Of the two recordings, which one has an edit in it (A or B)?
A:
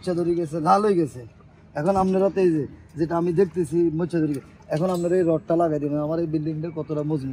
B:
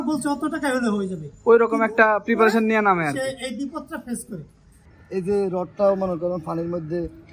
B